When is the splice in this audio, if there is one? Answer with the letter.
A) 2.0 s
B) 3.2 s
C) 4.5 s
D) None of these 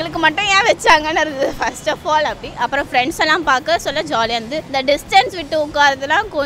D